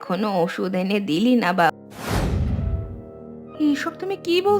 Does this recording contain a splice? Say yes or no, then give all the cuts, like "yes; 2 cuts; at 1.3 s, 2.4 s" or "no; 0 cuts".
yes; 1 cut; at 1.7 s